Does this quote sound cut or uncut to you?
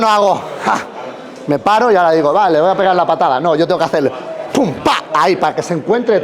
uncut